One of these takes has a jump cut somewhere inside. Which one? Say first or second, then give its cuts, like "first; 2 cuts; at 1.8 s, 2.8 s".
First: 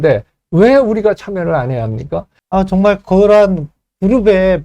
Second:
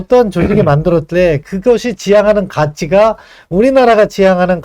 first; 1 cut; at 2.3 s